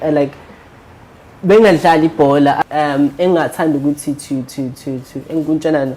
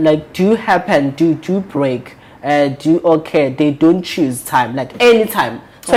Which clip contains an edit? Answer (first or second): first